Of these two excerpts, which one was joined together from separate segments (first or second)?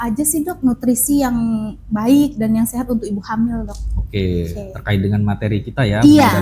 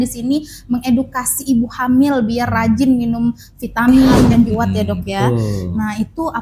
second